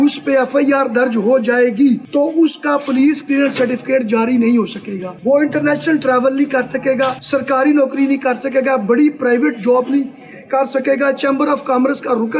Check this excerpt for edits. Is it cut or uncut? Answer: uncut